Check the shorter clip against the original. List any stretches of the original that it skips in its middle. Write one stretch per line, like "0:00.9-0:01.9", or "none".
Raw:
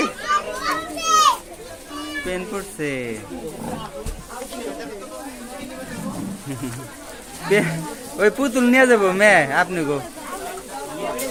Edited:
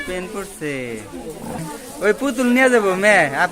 0:03.8-0:07.8